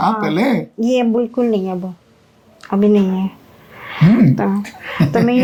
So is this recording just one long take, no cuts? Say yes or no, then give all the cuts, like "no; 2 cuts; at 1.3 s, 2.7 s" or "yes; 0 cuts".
yes; 0 cuts